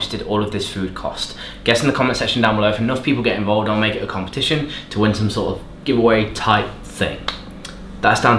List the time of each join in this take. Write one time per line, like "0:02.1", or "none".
none